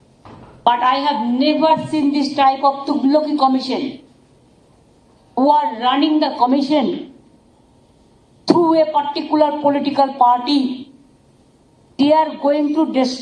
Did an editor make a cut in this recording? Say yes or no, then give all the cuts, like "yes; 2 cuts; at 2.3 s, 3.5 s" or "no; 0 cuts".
yes; 1 cut; at 1.0 s